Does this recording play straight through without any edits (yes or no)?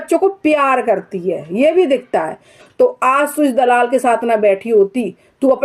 no